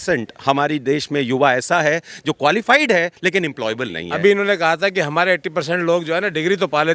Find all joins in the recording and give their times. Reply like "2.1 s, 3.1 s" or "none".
4.0 s